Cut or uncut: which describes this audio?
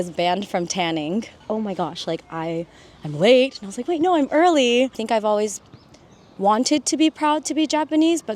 cut